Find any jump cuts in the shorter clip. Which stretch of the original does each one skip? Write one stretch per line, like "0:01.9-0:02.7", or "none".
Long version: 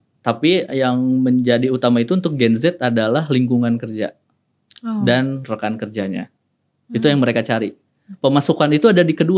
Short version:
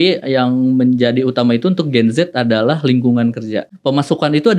0:04.2-0:08.1

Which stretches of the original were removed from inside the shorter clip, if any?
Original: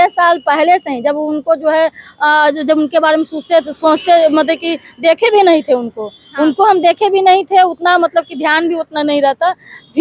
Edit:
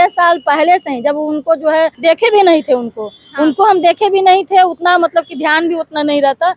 0:02.0-0:05.0

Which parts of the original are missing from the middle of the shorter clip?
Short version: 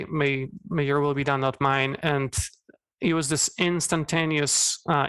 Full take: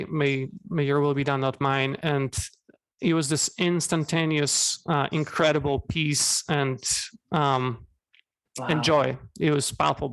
none

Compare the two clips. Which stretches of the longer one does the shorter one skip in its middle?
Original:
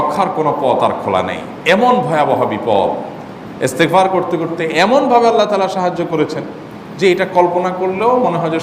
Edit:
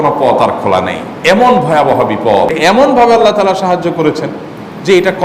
0:02.9-0:04.7

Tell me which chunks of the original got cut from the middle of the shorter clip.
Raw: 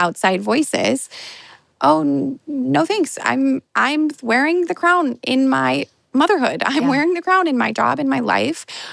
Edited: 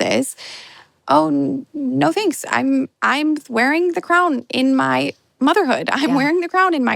none

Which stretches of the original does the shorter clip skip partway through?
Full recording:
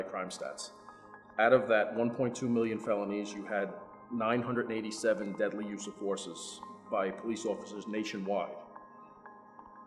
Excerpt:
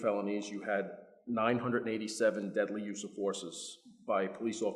none

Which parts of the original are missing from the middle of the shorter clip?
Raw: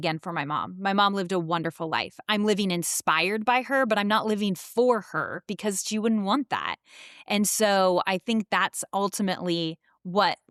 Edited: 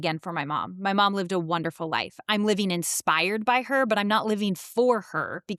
none

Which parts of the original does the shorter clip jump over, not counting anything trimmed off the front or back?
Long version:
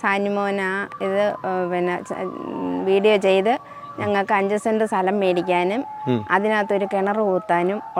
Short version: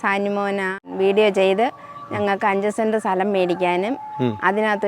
0:00.9-0:02.8

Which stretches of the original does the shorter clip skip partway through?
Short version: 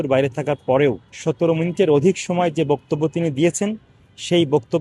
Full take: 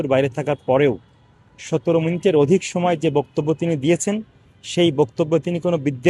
0:01.1-0:01.5

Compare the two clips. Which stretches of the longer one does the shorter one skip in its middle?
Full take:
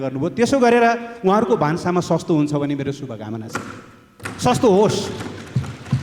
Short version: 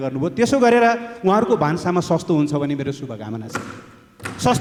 none

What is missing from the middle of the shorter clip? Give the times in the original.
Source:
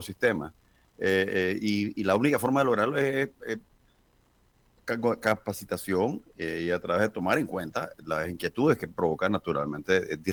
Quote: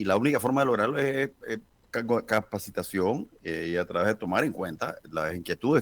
0:03.7-0:04.7

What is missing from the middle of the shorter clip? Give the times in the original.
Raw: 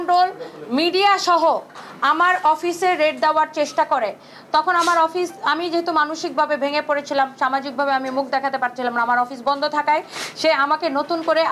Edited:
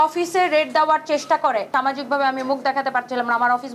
0:04.1-0:07.3

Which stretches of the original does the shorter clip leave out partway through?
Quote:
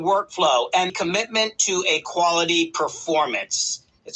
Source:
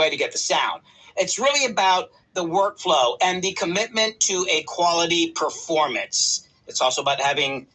0:03.4-0:03.5

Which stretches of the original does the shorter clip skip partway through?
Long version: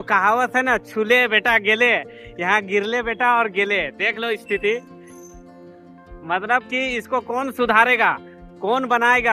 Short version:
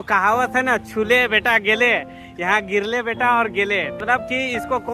0:04.0-0:06.4

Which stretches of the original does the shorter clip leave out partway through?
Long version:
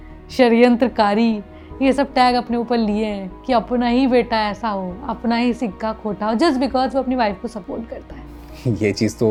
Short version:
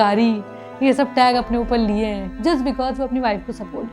0:03.4-0:06.3

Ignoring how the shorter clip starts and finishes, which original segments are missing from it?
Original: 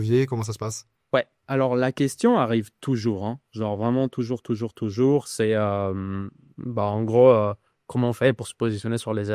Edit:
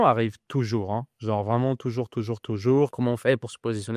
0:05.3-0:07.9

